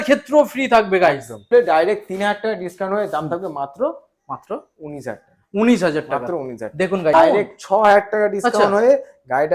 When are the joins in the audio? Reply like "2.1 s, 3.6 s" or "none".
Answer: 1.5 s, 7.1 s